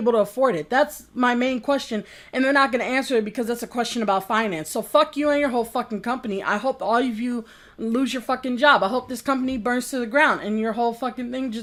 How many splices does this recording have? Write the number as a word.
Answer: zero